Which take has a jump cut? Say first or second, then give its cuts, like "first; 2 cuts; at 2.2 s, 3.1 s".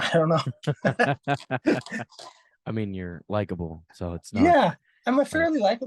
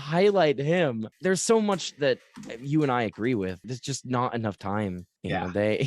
second; 2 cuts; at 1.1 s, 3.6 s